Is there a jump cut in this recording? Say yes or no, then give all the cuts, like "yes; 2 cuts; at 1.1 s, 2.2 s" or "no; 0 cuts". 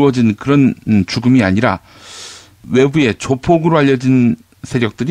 yes; 1 cut; at 2.0 s